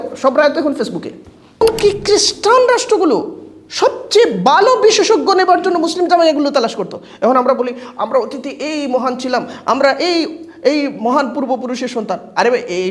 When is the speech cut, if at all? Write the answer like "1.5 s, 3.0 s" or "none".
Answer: 1.6 s

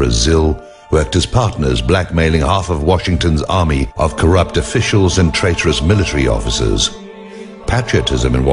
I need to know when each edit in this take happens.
none

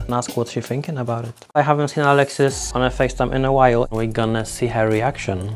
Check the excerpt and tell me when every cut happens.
none

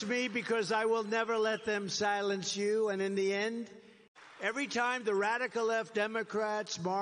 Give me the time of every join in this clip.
none

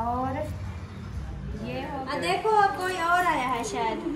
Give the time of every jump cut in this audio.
2.0 s

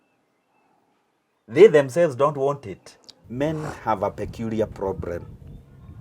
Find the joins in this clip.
3.1 s

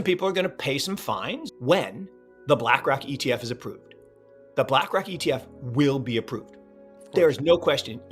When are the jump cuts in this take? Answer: 1.4 s

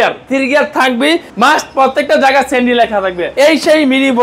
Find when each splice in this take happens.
1.3 s, 3.3 s

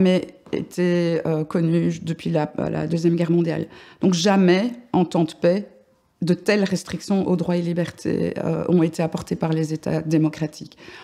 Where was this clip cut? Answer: none

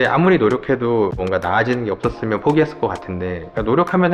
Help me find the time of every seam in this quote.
none

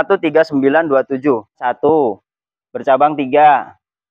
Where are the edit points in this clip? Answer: 1.6 s

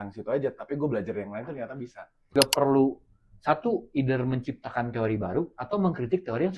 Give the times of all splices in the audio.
2.3 s

